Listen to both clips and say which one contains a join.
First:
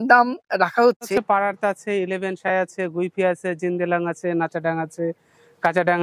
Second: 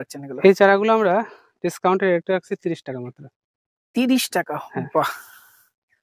first; 1 cut; at 1.2 s

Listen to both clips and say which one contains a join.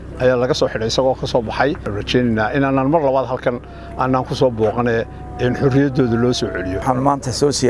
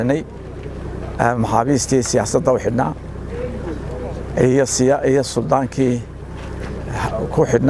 first; 2 cuts; at 1.9 s, 6.8 s

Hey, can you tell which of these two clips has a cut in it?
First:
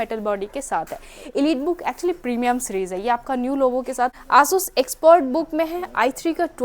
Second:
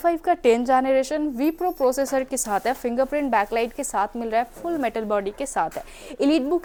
first; 1 cut; at 4.2 s

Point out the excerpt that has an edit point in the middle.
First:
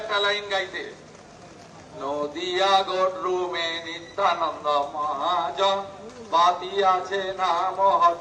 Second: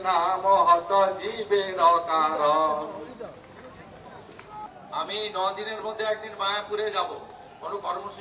second; 1 cut; at 4.7 s

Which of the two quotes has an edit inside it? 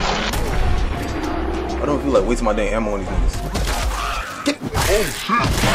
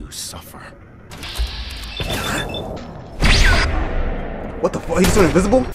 second; 2 cuts; at 1.1 s, 2.8 s

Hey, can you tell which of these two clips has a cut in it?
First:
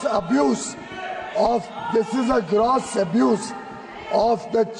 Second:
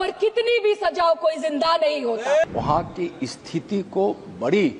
second; 1 cut; at 2.5 s

